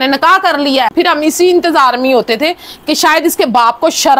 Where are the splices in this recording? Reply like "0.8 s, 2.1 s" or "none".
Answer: 0.9 s